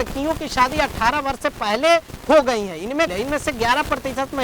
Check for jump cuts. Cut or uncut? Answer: cut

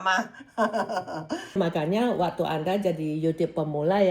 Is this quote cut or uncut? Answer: cut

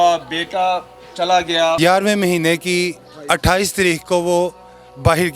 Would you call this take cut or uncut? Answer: cut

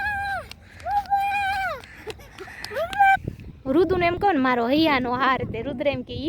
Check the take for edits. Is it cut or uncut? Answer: cut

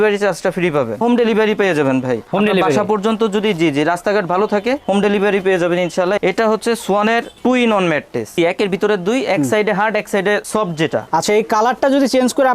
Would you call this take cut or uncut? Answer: cut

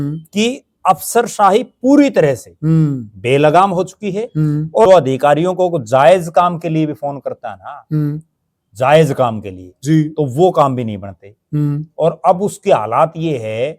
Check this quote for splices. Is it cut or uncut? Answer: cut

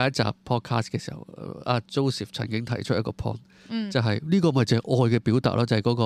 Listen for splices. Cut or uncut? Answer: uncut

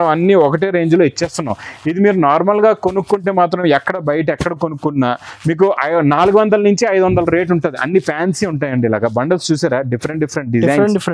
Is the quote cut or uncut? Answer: uncut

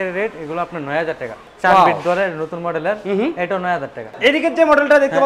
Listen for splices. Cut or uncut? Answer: cut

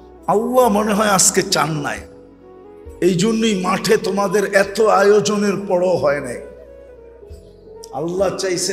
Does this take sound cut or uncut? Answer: cut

